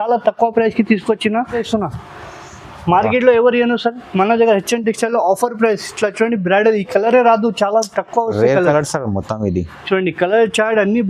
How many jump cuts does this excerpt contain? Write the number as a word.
one